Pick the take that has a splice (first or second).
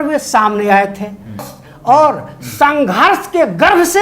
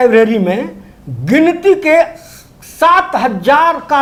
first